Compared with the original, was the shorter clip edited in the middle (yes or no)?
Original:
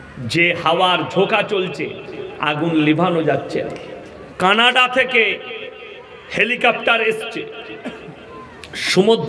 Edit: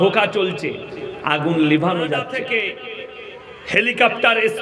yes